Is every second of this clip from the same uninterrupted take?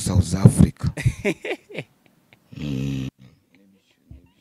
yes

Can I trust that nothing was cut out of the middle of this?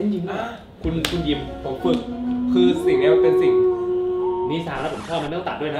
yes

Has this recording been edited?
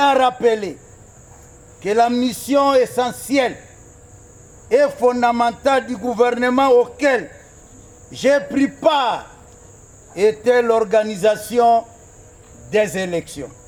no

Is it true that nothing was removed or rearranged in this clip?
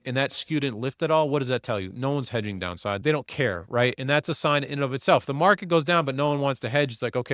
yes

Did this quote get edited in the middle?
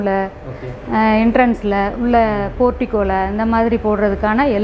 no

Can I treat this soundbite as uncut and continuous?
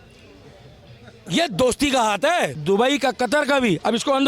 no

